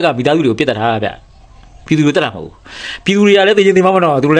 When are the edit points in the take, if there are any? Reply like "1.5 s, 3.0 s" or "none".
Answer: none